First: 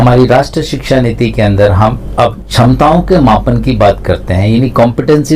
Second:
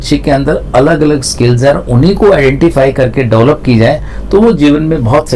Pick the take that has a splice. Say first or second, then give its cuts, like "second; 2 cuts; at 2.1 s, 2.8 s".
first; 1 cut; at 2.4 s